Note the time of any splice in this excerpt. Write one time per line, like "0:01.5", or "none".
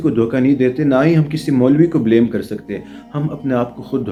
none